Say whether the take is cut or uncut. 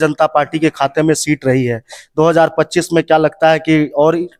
uncut